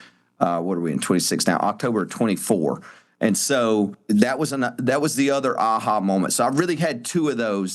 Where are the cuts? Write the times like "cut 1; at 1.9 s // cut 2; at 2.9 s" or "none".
cut 1; at 4.0 s